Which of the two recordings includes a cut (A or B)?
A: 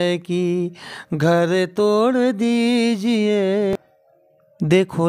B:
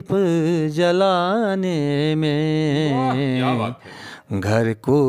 A